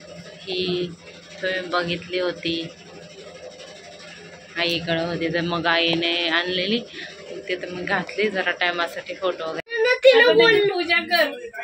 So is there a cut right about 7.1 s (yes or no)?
no